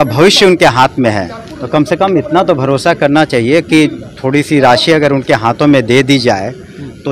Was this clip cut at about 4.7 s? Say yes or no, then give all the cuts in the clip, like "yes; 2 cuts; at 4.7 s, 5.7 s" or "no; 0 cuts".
no; 0 cuts